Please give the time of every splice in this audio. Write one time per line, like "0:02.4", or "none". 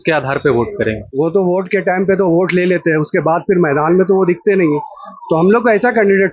0:01.0